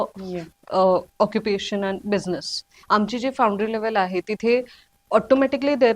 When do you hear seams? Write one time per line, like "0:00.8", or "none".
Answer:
0:02.7